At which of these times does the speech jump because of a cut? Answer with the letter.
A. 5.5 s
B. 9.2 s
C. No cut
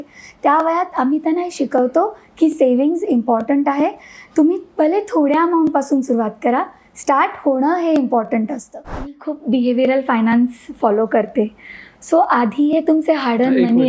B